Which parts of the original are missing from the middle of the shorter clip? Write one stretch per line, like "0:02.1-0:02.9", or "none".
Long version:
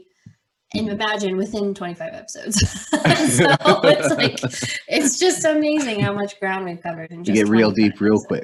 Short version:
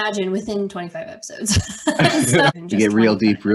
0:03.6-0:07.1